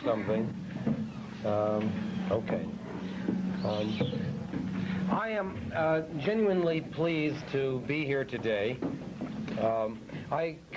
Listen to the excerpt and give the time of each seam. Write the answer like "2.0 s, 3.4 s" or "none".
none